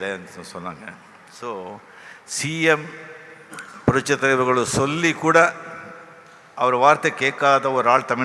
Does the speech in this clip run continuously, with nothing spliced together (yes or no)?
yes